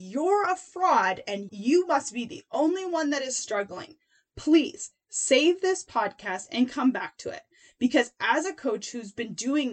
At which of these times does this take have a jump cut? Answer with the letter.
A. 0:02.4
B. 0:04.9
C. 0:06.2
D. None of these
D